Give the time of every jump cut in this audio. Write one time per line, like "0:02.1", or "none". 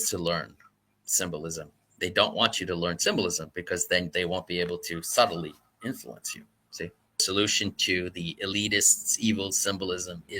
0:07.2